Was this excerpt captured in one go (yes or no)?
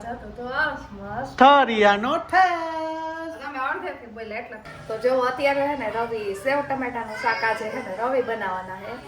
no